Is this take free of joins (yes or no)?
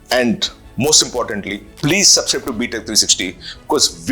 no